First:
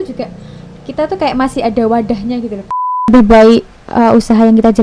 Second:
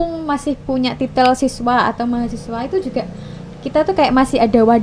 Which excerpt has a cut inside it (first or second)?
first